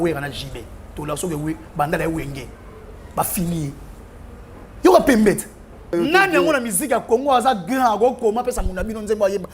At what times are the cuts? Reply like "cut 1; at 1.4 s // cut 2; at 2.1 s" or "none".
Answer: cut 1; at 5.9 s